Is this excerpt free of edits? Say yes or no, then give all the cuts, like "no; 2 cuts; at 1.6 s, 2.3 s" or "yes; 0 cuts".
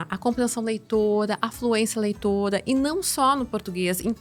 yes; 0 cuts